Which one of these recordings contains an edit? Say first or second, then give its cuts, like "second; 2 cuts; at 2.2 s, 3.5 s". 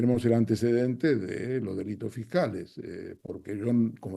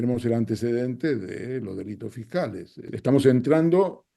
second; 1 cut; at 2.9 s